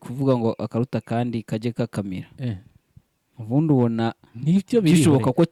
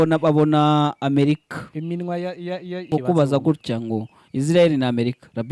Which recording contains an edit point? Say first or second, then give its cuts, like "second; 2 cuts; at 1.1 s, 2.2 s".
second; 1 cut; at 2.9 s